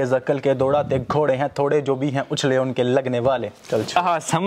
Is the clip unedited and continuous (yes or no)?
yes